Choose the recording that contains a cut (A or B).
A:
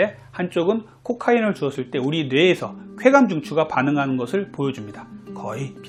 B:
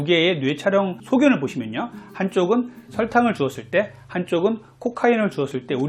B